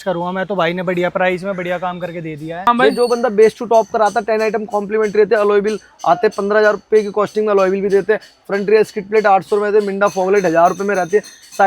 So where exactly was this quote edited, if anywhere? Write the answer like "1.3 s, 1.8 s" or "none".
2.7 s